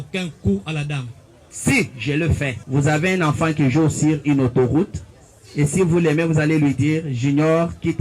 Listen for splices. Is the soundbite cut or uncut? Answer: cut